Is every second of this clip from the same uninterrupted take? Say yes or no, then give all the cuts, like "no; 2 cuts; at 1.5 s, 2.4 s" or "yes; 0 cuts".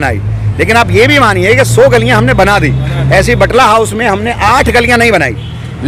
yes; 0 cuts